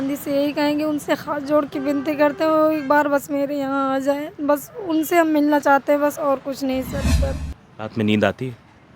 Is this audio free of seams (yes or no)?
no